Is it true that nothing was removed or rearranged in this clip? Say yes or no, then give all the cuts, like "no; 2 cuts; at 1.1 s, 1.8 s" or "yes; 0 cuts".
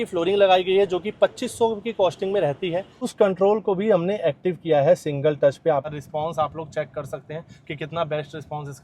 no; 2 cuts; at 3.1 s, 6.0 s